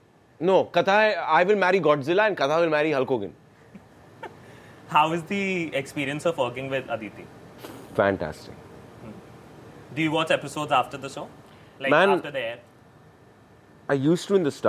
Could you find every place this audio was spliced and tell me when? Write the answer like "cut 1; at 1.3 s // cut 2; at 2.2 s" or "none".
none